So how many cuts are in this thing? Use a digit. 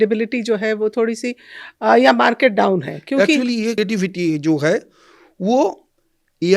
1